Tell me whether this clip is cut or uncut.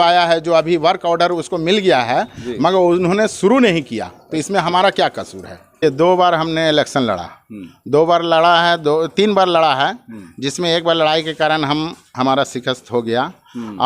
cut